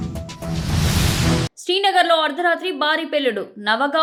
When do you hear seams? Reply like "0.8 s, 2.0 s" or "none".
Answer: none